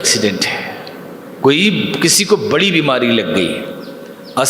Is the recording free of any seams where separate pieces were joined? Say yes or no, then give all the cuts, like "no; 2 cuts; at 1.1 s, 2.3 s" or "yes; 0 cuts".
yes; 0 cuts